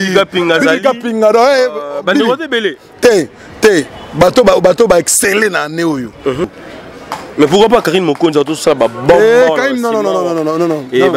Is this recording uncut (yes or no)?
no